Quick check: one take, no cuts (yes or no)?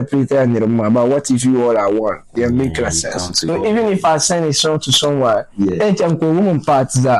no